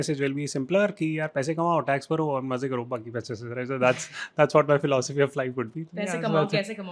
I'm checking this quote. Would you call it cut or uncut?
uncut